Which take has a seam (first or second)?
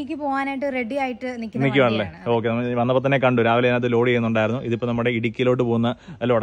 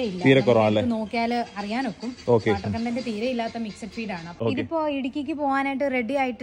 second